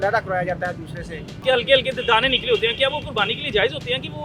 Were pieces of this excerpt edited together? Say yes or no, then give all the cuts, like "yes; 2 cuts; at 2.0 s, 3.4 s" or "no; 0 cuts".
yes; 1 cut; at 1.4 s